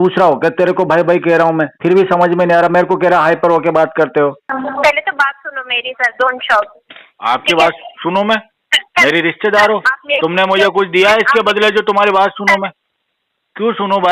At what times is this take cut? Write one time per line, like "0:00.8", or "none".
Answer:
0:04.5